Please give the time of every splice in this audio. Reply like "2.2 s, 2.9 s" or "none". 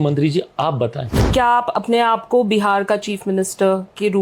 1.3 s